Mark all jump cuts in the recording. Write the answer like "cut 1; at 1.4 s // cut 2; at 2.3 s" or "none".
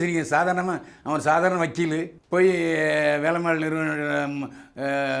cut 1; at 2.2 s